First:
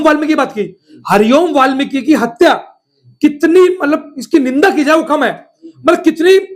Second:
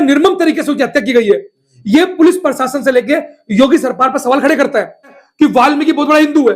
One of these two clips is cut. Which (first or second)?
second